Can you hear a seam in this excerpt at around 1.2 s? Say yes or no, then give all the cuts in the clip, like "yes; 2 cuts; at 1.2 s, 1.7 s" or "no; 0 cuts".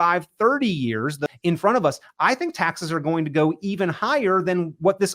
yes; 1 cut; at 1.2 s